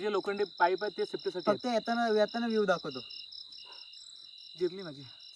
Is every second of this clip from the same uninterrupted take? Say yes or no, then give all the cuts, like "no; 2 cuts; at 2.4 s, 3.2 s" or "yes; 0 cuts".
yes; 0 cuts